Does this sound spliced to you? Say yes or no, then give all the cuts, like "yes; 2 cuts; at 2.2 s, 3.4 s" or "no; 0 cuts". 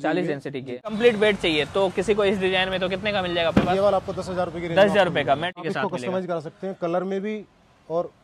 yes; 2 cuts; at 0.9 s, 5.6 s